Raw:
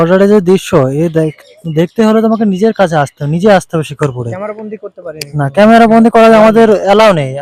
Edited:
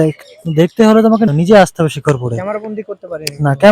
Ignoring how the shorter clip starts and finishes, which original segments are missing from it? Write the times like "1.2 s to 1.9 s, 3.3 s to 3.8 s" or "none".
2.5 s to 3.2 s